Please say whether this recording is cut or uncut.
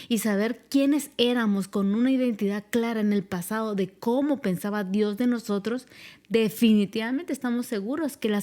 uncut